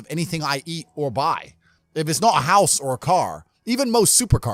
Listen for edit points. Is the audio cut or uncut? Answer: uncut